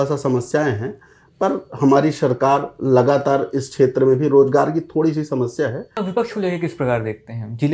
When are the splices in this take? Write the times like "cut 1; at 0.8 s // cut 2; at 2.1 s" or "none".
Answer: cut 1; at 6.0 s